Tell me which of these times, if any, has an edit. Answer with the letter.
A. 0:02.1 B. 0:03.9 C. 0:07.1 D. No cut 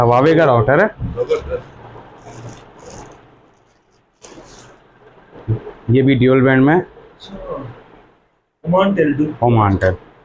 D